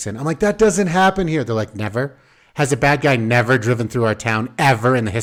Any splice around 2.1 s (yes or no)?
no